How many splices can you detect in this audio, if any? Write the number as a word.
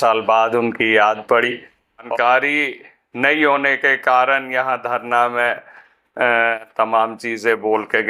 one